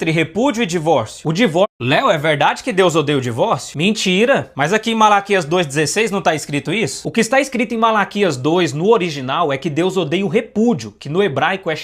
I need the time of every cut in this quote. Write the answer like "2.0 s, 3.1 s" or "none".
1.6 s